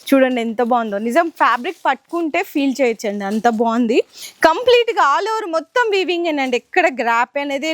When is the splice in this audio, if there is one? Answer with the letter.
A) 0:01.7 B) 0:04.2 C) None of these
B